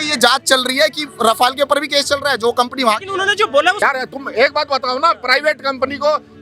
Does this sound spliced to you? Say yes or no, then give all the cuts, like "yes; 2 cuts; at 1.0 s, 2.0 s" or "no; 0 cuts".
yes; 1 cut; at 3.8 s